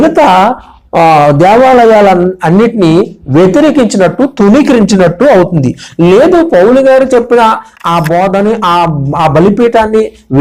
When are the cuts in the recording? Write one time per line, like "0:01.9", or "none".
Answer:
none

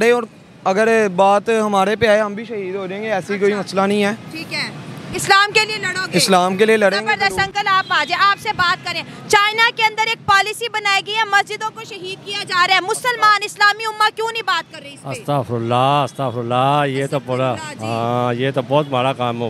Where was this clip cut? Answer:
none

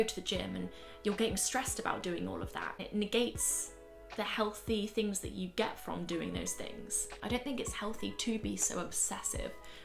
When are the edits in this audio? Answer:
0:02.8
0:07.0

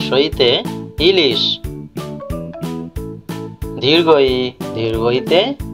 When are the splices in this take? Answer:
0:01.4
0:03.8

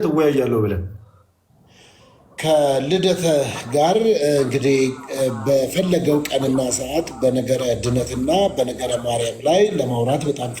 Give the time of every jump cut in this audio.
none

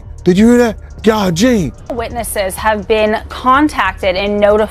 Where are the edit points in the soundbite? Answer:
0:02.0

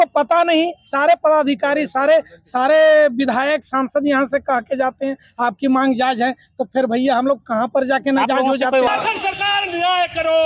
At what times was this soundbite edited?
0:08.9

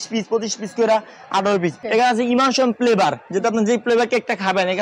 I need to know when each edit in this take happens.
0:01.8

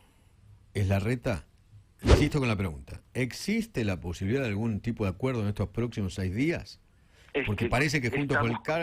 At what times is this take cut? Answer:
0:02.0

